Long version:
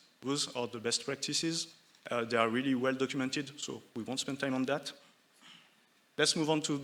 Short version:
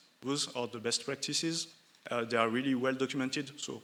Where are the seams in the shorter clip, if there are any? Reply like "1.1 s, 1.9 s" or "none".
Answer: none